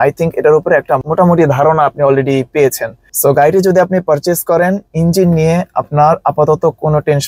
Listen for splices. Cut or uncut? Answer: uncut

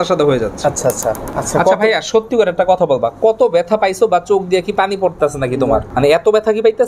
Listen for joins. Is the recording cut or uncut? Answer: cut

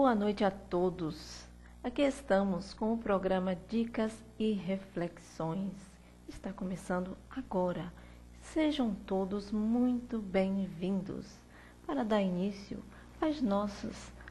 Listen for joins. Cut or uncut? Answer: uncut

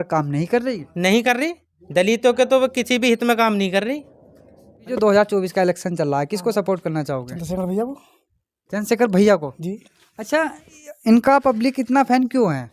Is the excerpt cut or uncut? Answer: cut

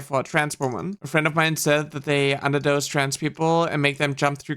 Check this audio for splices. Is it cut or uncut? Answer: cut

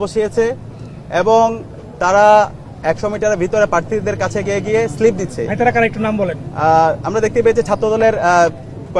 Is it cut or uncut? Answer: uncut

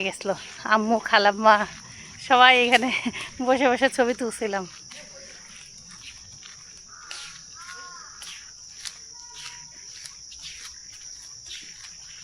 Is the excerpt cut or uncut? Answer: uncut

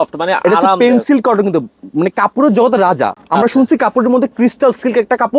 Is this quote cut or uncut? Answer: uncut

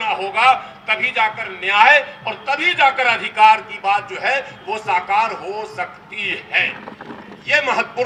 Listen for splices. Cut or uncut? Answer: uncut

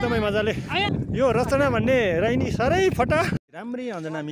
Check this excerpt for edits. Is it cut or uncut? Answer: cut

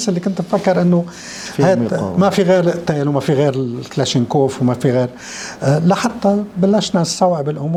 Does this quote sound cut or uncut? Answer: uncut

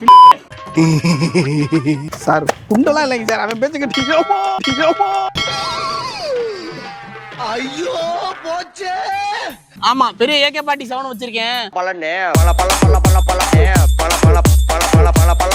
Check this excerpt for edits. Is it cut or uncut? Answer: cut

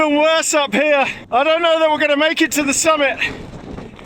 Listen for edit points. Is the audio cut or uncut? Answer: cut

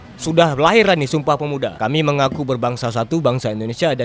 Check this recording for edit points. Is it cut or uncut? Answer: cut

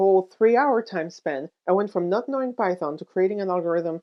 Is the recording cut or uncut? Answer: uncut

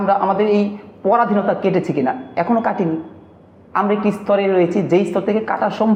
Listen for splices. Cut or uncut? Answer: uncut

